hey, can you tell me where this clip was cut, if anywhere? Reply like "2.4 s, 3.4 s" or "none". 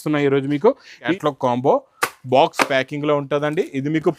1.1 s